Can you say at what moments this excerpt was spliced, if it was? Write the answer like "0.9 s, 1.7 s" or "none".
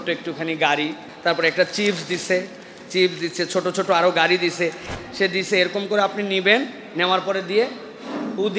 1.0 s, 4.9 s